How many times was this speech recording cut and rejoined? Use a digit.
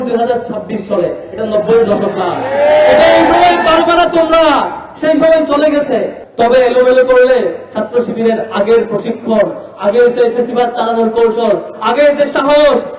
1